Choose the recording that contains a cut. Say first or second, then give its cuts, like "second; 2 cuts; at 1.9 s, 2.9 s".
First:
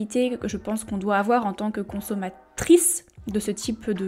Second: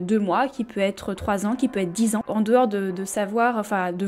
second; 1 cut; at 2.3 s